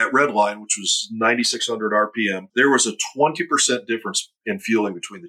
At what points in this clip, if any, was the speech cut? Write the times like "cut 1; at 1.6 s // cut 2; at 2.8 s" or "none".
cut 1; at 2.4 s

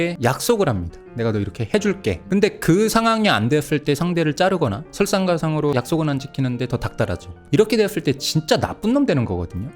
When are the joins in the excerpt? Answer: cut 1; at 2.2 s // cut 2; at 5.7 s

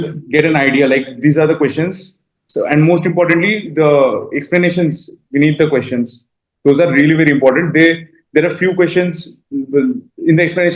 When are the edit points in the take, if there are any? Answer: none

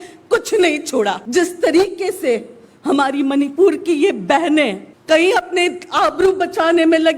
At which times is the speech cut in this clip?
cut 1; at 1.2 s // cut 2; at 4.9 s

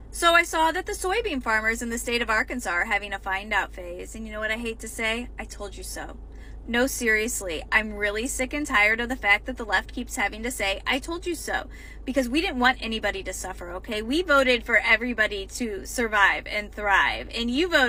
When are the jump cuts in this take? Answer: none

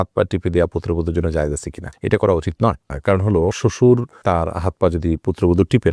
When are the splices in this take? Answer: none

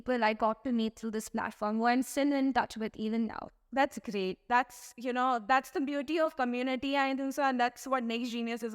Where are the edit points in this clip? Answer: none

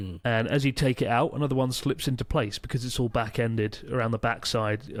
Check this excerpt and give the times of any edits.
none

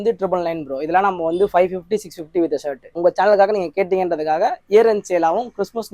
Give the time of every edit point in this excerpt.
cut 1; at 3.0 s

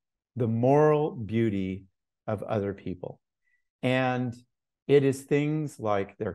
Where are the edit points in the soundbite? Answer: none

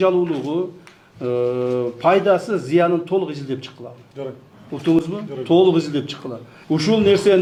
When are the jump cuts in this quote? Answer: none

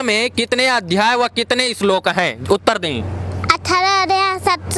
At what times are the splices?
none

